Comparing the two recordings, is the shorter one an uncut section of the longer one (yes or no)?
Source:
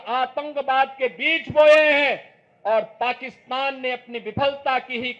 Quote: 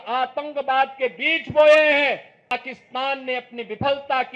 no